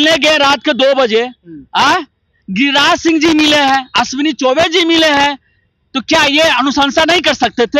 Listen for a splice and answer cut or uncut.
uncut